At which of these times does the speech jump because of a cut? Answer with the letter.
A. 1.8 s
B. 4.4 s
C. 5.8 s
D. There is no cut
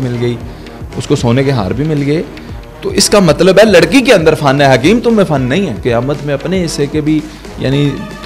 C